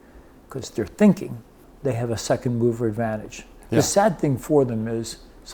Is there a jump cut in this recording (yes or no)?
no